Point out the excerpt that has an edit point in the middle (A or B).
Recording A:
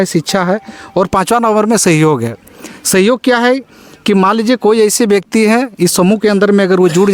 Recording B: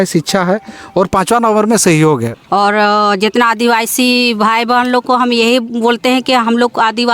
B